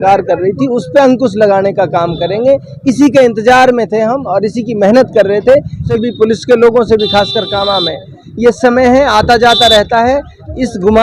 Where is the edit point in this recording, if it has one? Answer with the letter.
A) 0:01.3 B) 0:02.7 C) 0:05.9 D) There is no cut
C